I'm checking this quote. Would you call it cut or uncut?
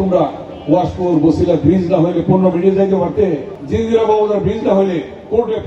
cut